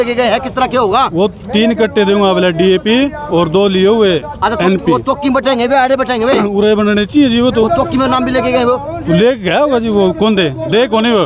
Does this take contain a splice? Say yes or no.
no